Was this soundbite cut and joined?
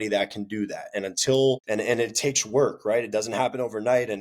yes; 1 cut; at 1.6 s

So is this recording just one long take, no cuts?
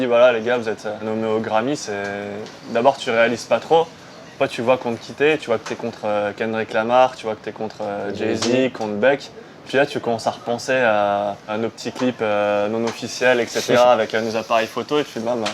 no; 3 cuts; at 1.0 s, 9.7 s, 11.5 s

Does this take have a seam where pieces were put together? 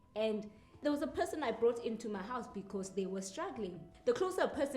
yes; 2 cuts; at 0.8 s, 3.9 s

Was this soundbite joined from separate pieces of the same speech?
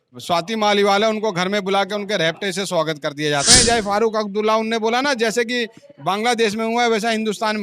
yes; 1 cut; at 3.5 s

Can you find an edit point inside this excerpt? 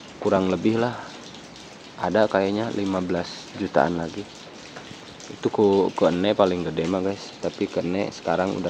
no; 0 cuts

